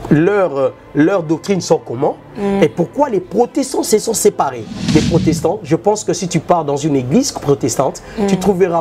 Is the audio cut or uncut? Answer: cut